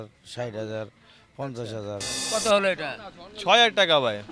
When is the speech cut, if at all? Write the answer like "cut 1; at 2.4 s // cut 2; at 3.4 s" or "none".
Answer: cut 1; at 2.2 s